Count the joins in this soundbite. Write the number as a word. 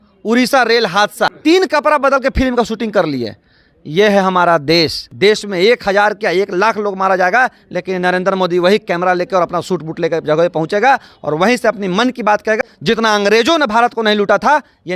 three